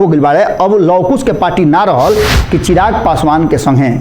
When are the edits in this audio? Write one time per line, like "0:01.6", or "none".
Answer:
0:02.4